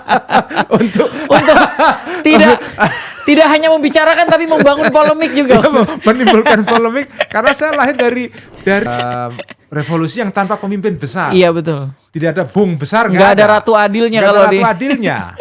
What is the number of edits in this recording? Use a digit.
1